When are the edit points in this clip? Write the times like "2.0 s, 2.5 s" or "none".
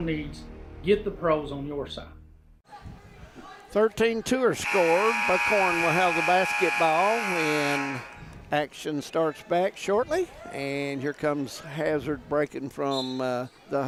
none